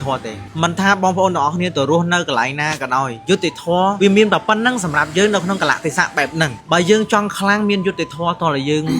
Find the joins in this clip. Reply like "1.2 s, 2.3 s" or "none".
4.0 s